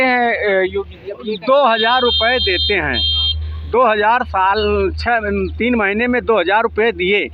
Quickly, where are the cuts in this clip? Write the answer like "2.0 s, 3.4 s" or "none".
none